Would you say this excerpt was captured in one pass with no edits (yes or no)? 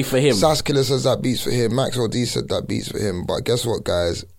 yes